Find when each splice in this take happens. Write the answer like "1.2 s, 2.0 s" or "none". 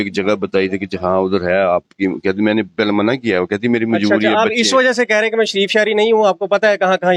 none